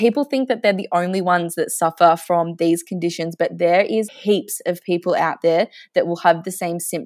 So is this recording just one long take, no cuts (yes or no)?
no